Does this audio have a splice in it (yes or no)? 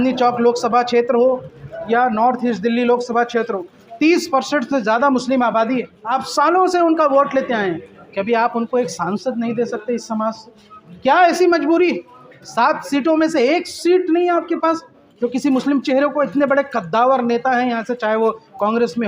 yes